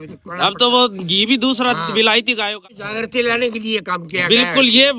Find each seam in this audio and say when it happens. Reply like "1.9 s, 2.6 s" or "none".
2.7 s